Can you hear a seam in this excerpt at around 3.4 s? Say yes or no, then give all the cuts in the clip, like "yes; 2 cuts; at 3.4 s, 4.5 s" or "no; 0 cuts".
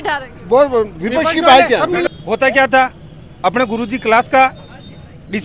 no; 1 cut; at 2.1 s